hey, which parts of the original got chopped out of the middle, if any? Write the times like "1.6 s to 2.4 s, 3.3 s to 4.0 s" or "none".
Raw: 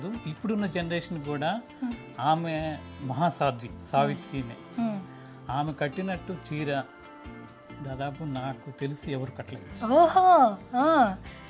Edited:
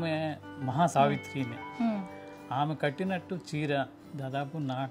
3.3 s to 3.9 s, 7.0 s to 7.7 s

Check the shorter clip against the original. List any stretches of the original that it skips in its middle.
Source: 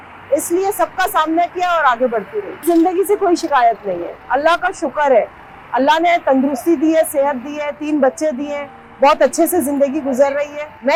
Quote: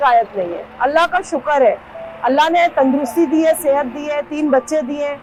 none

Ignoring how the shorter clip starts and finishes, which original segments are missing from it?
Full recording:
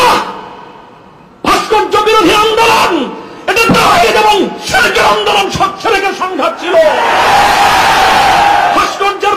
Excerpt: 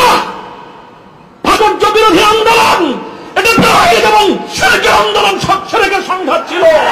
1.6 s to 1.7 s

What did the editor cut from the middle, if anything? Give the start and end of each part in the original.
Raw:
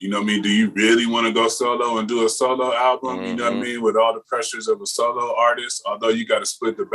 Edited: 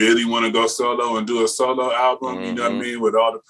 none

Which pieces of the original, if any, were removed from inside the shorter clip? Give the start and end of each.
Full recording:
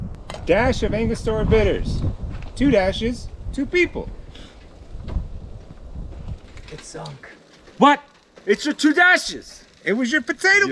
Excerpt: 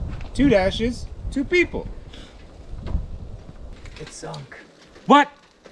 5.9 s to 6.4 s

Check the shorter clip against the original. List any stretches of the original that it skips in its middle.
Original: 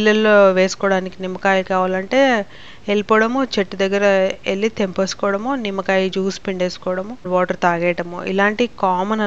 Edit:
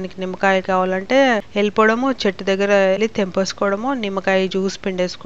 2.5 s to 2.8 s, 4.3 s to 4.6 s

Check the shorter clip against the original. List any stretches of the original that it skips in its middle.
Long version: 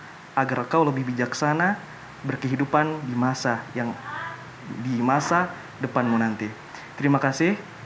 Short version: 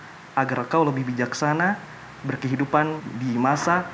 3.0 s to 4.7 s

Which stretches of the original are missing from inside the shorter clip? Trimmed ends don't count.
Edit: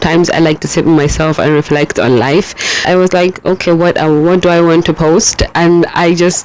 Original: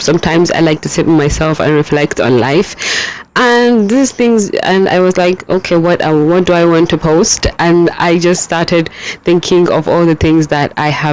3.1 s to 4.9 s

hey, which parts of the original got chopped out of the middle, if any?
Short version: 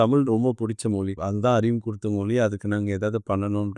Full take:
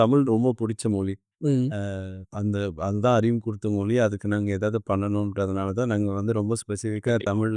1.2 s to 2.8 s

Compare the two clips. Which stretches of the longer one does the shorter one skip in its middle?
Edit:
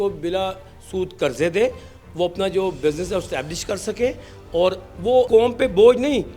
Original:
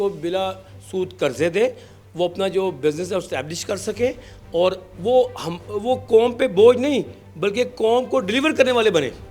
5.3 s to 6.1 s

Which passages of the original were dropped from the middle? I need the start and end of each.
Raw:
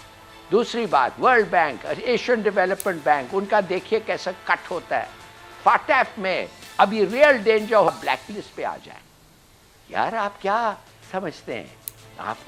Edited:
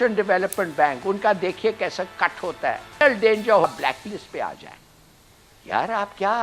5.3 s to 7.3 s

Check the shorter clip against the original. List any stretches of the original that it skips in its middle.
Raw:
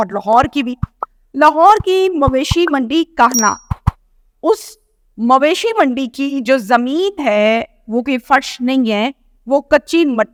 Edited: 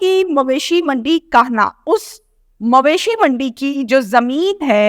3.6 s to 4.3 s

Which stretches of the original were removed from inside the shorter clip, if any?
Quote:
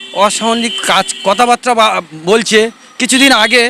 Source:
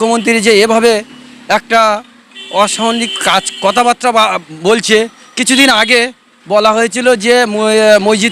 none

